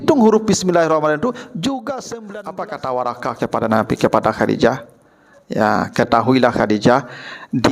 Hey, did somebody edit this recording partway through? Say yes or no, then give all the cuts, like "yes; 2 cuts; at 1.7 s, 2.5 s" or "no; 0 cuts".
yes; 1 cut; at 2.1 s